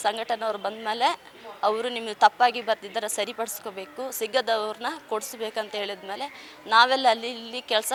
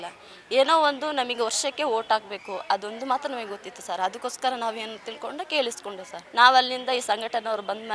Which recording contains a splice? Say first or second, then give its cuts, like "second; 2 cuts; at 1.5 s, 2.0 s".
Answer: second; 1 cut; at 6.1 s